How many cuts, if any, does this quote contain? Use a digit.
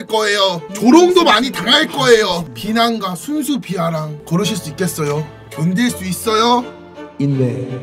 3